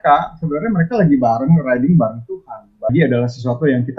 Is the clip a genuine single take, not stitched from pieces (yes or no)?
no